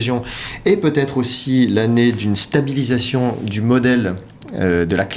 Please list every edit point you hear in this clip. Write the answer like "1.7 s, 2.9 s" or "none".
none